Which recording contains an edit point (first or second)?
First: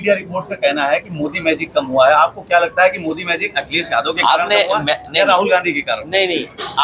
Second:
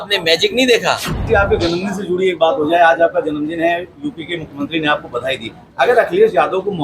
second